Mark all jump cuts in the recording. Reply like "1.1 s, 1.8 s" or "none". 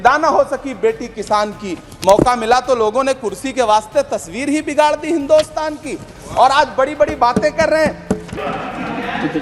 8.1 s